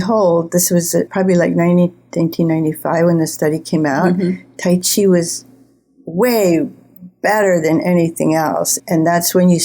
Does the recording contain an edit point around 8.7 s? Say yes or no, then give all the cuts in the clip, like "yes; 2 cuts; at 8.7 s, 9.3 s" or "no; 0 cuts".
yes; 2 cuts; at 1.1 s, 8.7 s